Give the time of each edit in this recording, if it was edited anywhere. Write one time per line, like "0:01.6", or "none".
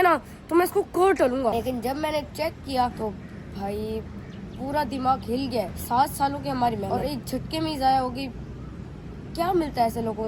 0:01.5